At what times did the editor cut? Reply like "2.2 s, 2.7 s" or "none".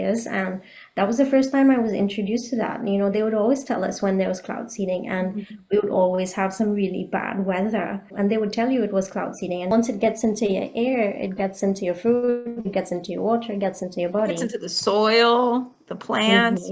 8.1 s, 9.7 s